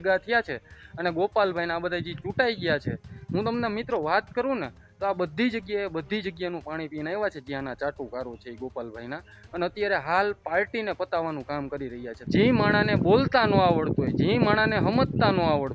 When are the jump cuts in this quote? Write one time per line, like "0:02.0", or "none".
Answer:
0:12.1